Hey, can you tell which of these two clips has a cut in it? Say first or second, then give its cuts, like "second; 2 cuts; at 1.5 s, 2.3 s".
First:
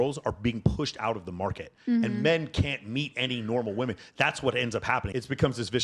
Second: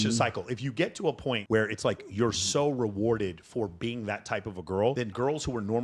second; 2 cuts; at 1.4 s, 5.1 s